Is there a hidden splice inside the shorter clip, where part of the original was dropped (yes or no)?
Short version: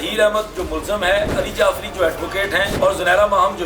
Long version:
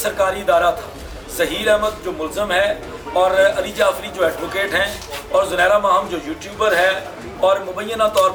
yes